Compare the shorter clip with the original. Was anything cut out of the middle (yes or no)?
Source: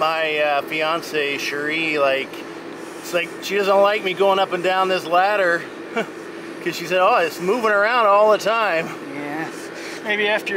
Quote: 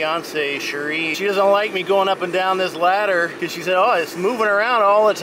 yes